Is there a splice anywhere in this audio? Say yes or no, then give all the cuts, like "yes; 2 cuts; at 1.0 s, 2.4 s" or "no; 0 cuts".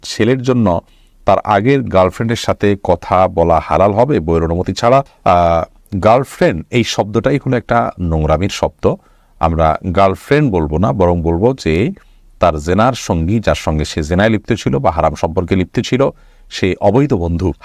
no; 0 cuts